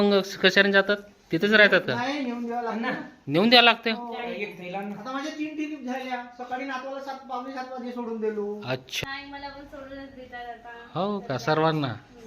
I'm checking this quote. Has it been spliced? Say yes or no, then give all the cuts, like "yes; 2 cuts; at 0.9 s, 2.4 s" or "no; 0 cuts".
yes; 1 cut; at 8.9 s